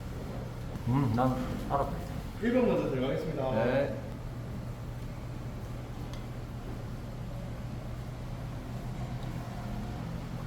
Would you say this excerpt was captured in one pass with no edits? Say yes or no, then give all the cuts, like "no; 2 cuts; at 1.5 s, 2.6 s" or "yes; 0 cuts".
no; 1 cut; at 2.2 s